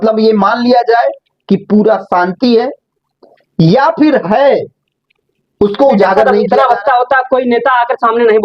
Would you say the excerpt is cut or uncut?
cut